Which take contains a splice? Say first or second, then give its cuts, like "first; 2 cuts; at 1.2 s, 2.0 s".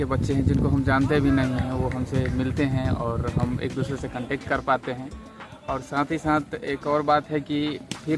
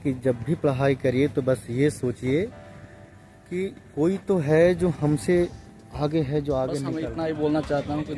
second; 1 cut; at 6.9 s